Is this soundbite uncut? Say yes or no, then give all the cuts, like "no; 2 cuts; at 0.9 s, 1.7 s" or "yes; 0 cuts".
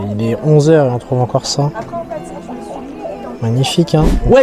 yes; 0 cuts